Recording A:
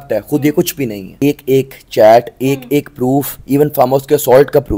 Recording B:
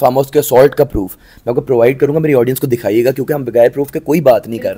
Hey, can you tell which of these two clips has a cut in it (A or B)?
A